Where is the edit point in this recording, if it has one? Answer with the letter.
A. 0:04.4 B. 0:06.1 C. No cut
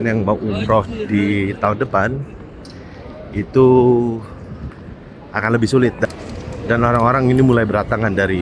B